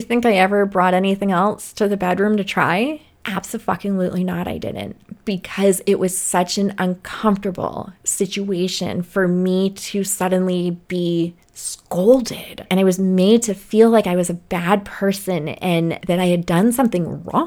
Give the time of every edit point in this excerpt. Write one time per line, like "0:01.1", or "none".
0:12.6